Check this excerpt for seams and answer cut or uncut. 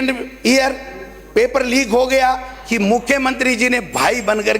cut